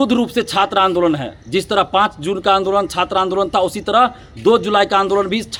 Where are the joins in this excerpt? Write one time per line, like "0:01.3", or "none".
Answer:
none